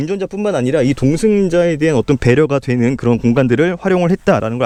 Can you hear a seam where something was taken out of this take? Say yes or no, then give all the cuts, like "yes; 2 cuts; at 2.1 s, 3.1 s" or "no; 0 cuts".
no; 0 cuts